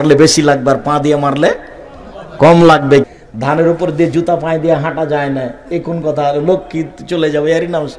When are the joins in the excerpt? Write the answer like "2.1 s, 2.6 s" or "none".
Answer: 3.0 s